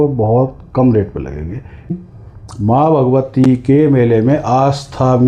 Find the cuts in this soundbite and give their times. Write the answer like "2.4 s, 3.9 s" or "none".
2.0 s